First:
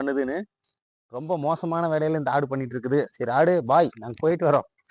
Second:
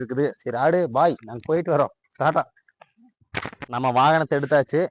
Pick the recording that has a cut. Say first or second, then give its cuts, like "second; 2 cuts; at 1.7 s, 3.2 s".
second; 1 cut; at 3.6 s